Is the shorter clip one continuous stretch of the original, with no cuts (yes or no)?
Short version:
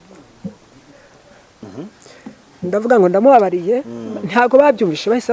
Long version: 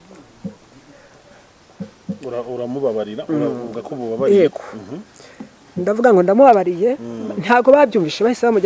no